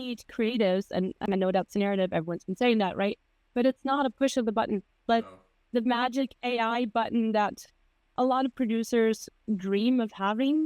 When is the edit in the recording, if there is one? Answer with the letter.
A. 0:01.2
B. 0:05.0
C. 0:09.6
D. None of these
A